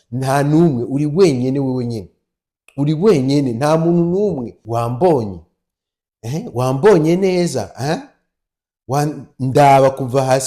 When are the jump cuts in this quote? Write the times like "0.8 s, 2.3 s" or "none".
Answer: 4.5 s